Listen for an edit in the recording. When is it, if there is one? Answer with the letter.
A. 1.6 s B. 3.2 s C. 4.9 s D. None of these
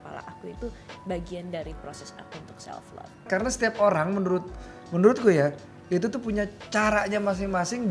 B